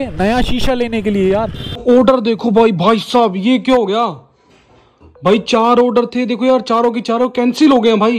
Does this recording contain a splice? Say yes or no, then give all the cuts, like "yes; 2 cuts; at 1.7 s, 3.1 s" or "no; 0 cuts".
yes; 1 cut; at 1.8 s